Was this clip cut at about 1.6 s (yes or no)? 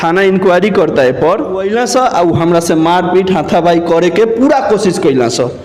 yes